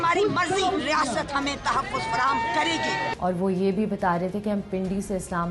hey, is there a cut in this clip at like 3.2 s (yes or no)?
yes